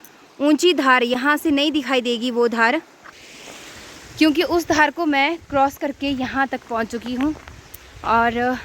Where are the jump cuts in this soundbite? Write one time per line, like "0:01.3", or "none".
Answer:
none